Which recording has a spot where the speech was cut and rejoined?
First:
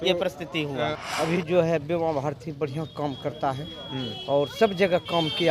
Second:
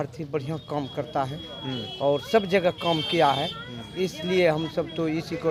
first; 1 cut; at 1.0 s

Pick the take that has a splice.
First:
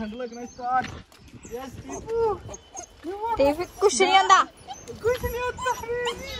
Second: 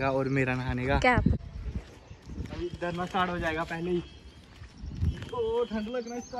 second; 1 cut; at 1.4 s

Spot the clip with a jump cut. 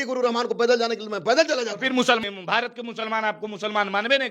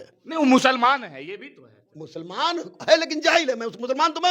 first; 1 cut; at 2.2 s

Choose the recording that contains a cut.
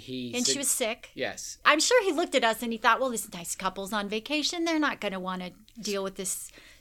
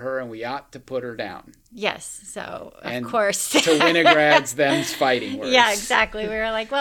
first; 1 cut; at 1.6 s

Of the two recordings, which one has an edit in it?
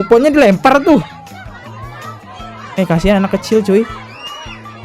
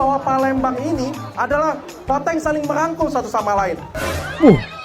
second; 1 cut; at 3.9 s

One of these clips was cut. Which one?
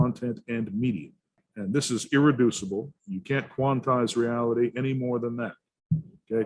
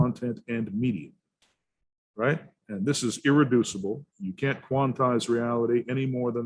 first; 1 cut; at 1.4 s

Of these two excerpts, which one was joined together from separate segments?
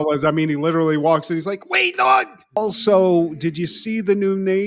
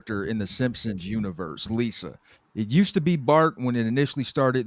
first; 1 cut; at 2.6 s

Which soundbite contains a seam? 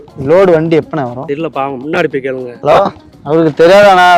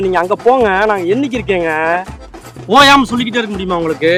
first; 2 cuts; at 1.2 s, 2.5 s

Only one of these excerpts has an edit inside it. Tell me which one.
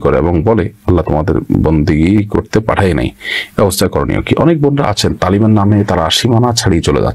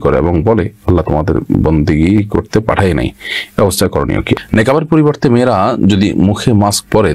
second; 1 cut; at 4.4 s

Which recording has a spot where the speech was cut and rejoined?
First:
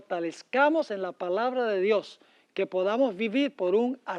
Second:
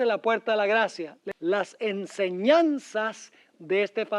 second; 1 cut; at 1.2 s

